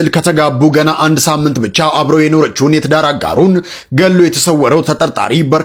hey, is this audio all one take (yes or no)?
yes